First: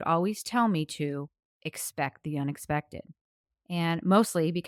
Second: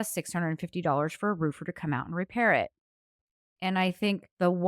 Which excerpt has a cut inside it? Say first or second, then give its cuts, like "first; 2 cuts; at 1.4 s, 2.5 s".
second; 1 cut; at 3.7 s